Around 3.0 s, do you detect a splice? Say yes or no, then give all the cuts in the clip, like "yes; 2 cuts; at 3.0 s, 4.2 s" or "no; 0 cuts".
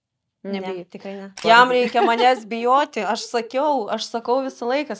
no; 1 cut; at 1.4 s